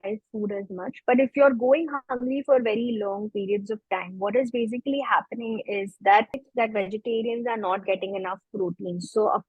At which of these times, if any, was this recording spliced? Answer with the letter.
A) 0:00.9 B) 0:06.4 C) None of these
B